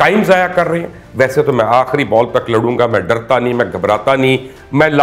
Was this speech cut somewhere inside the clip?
yes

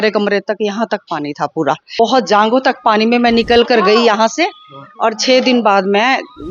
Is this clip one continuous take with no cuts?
no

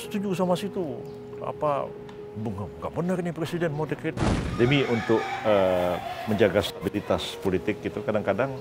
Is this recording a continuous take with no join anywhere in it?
no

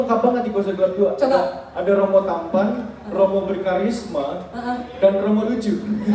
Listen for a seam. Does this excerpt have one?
no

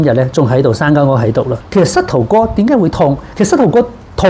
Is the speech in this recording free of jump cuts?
no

